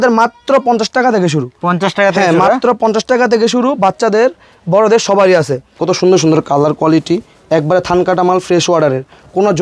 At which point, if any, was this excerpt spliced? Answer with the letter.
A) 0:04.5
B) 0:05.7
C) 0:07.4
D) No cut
B